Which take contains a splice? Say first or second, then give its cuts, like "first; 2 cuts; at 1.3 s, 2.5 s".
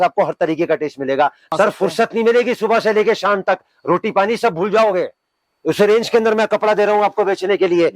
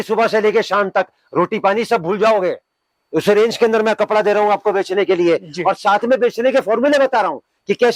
first; 1 cut; at 1.5 s